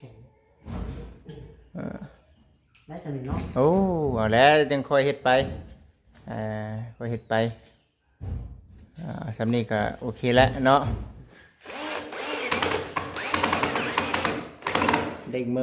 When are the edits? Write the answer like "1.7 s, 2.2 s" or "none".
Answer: 11.2 s